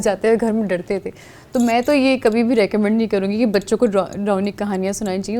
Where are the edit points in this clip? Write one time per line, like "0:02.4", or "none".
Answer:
none